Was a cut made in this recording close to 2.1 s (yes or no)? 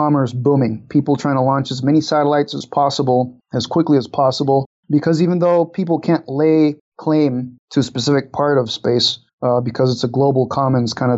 no